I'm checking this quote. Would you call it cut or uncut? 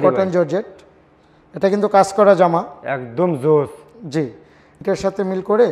cut